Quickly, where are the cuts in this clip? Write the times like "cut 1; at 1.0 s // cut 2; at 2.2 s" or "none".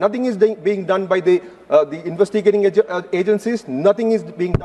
none